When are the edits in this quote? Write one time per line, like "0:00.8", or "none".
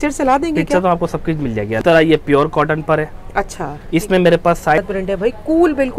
0:01.8
0:04.8